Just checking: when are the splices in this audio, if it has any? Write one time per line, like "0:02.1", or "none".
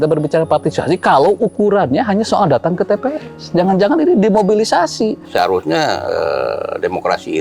0:05.2